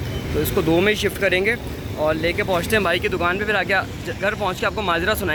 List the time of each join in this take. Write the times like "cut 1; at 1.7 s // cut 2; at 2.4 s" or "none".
none